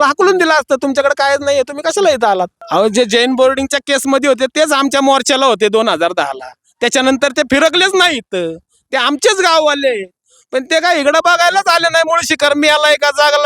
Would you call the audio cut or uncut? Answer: cut